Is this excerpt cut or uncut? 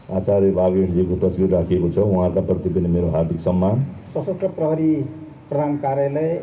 cut